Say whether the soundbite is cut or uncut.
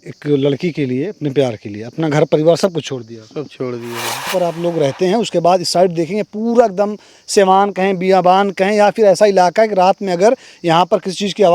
cut